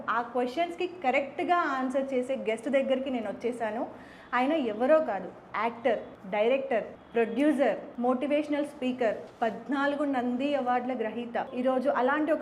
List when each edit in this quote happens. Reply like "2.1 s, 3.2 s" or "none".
6.1 s, 7.0 s, 7.9 s, 9.3 s, 11.5 s